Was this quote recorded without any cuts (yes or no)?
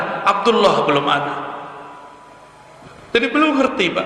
yes